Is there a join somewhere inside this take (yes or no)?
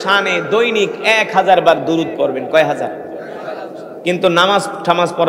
no